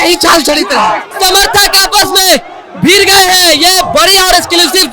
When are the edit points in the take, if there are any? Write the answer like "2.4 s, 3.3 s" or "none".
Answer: 1.1 s

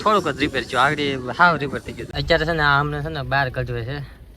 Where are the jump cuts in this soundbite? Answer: 2.1 s

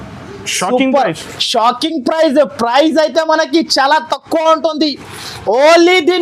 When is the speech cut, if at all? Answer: none

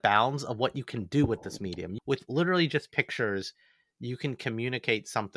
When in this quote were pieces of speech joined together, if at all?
1.9 s

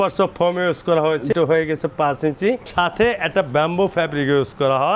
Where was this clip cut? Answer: 1.3 s, 2.7 s

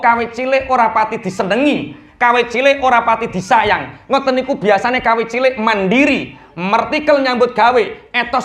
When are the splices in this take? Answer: none

